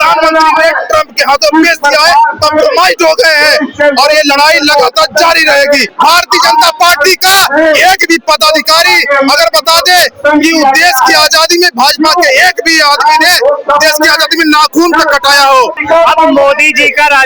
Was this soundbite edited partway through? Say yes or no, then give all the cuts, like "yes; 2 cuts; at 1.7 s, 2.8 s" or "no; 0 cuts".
yes; 2 cuts; at 5.8 s, 15.8 s